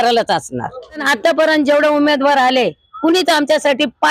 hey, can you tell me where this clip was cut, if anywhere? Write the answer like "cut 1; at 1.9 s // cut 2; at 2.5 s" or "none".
cut 1; at 1.0 s

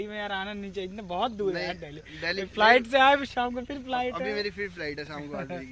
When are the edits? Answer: none

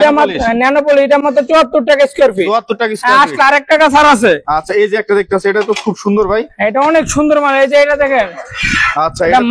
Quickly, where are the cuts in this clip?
none

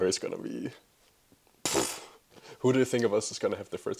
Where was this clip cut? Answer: none

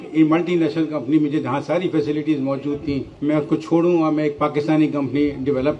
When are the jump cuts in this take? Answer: none

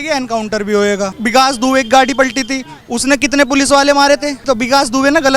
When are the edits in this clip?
cut 1; at 1.1 s // cut 2; at 4.4 s

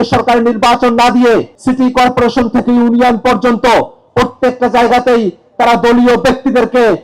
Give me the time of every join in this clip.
cut 1; at 1.5 s

